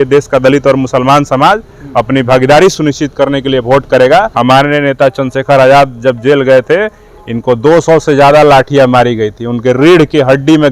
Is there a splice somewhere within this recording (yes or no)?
yes